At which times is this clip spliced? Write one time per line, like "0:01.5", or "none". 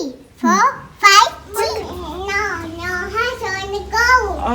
0:01.4